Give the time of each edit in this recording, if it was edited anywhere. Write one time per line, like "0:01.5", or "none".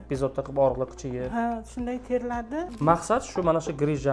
0:02.7

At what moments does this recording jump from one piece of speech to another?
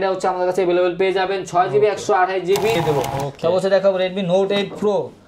0:02.8

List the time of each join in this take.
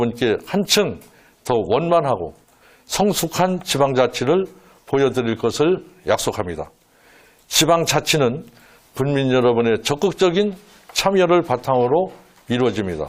none

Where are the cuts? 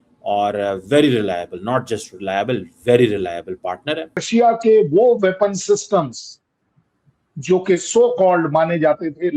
0:04.2

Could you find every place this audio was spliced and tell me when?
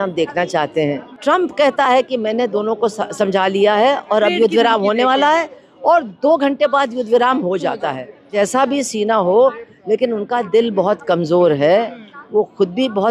0:01.1
0:08.1

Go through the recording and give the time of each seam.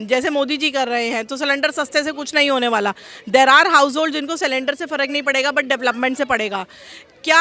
none

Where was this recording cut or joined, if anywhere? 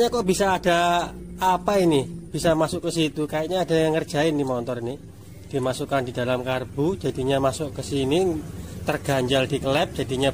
none

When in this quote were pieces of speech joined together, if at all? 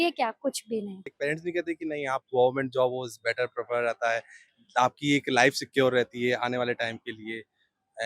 0:01.1

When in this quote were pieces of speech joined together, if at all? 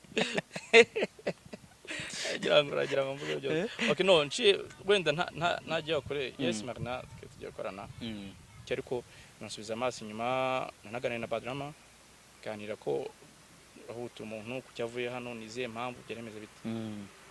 0:08.6

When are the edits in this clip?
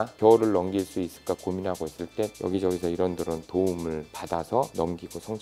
none

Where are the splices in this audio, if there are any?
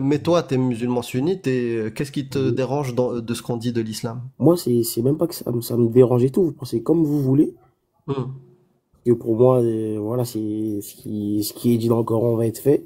0:04.2

